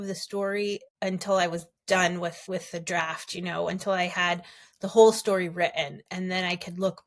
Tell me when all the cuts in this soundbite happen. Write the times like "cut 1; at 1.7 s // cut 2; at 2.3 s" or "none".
cut 1; at 0.9 s // cut 2; at 2.4 s